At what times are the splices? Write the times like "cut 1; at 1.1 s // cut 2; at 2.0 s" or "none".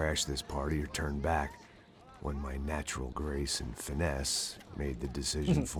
none